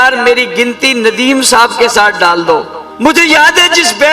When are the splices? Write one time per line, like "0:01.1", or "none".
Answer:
0:02.8